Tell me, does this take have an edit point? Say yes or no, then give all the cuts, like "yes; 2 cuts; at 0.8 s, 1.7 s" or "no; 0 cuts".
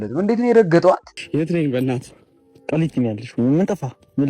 yes; 1 cut; at 1.2 s